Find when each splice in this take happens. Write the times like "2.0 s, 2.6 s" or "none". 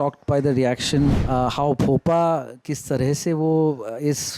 1.2 s